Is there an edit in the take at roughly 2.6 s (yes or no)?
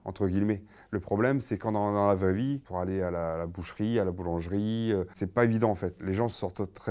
yes